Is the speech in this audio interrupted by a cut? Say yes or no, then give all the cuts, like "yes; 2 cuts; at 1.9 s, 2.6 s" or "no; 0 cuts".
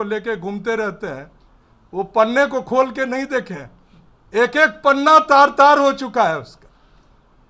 no; 0 cuts